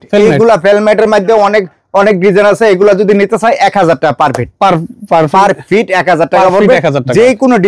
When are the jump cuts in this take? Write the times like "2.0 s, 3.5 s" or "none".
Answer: none